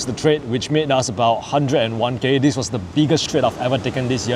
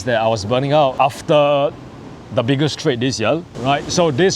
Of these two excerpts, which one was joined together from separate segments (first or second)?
second